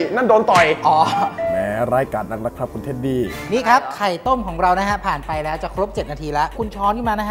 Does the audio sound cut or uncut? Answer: uncut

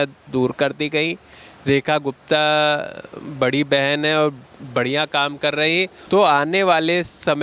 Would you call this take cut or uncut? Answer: cut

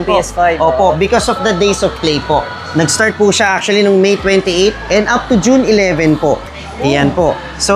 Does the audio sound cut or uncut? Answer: uncut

